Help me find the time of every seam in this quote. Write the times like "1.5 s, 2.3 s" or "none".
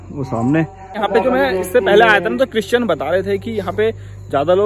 1.0 s